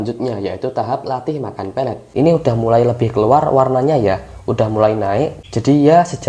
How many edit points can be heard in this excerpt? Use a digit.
2